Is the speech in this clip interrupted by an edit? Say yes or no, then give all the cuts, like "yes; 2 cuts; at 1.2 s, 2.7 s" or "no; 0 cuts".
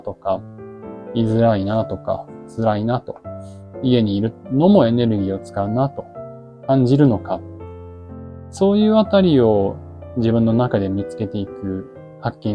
no; 0 cuts